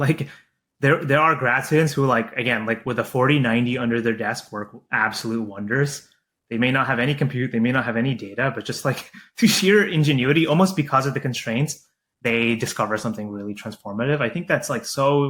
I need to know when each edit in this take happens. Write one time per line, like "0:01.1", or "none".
none